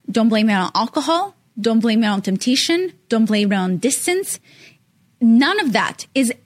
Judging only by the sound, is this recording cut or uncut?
uncut